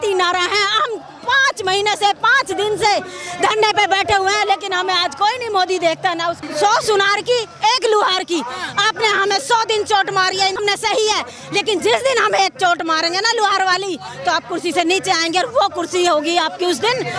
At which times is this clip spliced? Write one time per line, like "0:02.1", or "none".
0:06.4
0:10.6